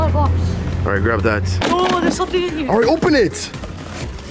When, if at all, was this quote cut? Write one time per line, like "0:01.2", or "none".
0:01.5